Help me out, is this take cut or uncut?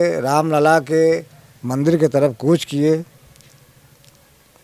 uncut